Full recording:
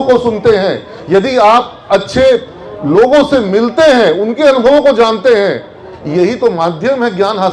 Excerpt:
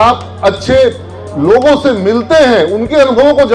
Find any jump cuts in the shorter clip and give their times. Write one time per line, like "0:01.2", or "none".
none